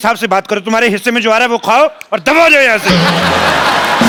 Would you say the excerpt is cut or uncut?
uncut